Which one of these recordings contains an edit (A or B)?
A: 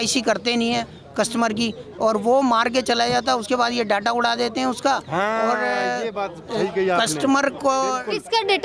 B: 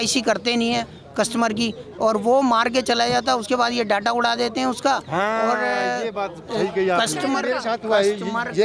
B